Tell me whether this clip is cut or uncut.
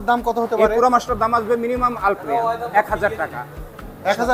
uncut